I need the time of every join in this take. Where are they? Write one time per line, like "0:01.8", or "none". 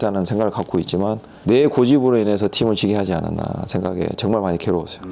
0:01.3

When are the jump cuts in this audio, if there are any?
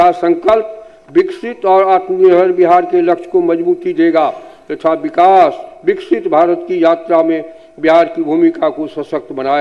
none

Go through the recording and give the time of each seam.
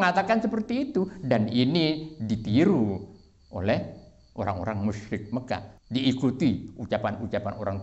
0:05.7

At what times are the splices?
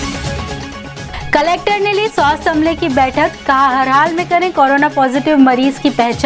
0:01.0

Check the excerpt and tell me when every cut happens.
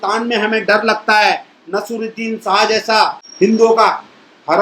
0:03.2

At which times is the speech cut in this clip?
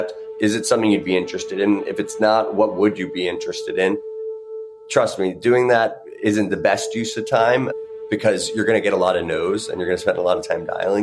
0:04.4

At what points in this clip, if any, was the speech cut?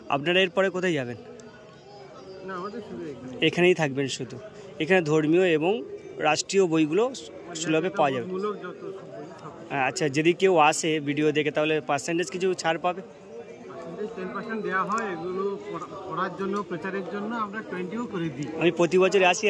none

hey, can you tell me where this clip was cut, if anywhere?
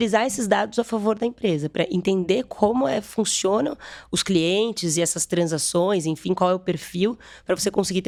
none

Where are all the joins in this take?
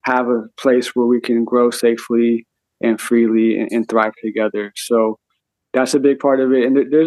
none

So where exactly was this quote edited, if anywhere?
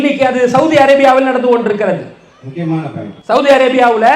0:03.1

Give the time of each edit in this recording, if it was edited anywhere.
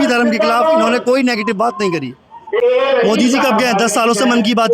0:02.6

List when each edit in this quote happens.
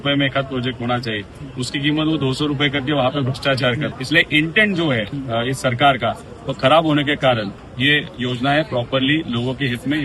0:04.0
0:05.1
0:07.6

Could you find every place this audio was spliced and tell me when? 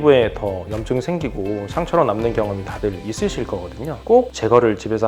0:04.0

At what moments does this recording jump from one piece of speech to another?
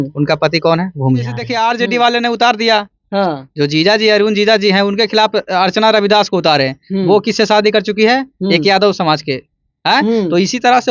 0:01.4

